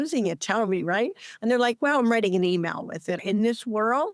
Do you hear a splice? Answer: yes; 1 cut; at 3.2 s

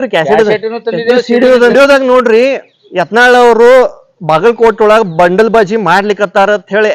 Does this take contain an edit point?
yes; 1 cut; at 1.5 s

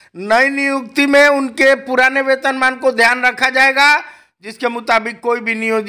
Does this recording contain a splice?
no; 0 cuts

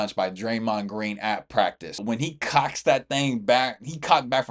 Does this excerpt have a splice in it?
yes; 1 cut; at 1.9 s

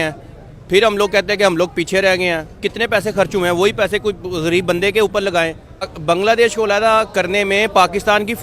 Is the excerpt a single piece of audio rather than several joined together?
no; 1 cut; at 5.9 s

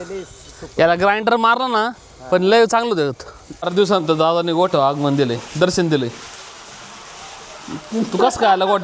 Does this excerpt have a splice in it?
yes; 1 cut; at 3.7 s

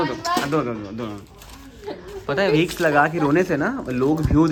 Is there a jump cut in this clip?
no; 0 cuts

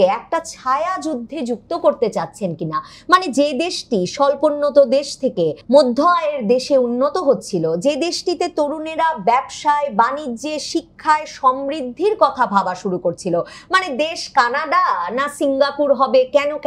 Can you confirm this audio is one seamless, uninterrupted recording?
yes; 0 cuts

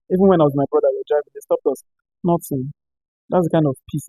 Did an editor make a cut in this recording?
no; 0 cuts

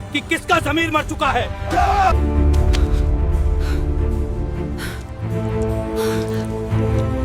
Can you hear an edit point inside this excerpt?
no; 0 cuts

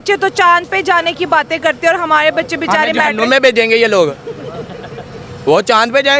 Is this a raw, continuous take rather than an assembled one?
yes; 0 cuts

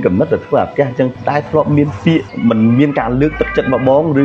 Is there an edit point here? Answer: yes; 2 cuts; at 1.1 s, 2.3 s

